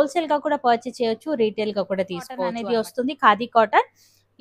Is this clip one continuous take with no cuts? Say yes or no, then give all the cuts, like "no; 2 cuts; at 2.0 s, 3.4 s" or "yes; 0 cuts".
no; 1 cut; at 2.5 s